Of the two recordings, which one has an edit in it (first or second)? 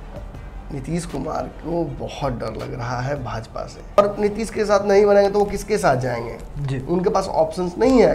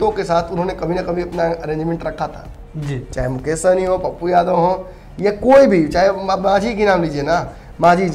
first